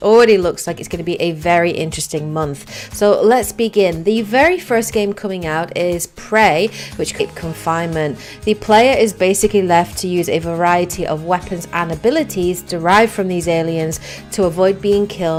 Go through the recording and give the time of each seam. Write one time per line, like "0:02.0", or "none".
none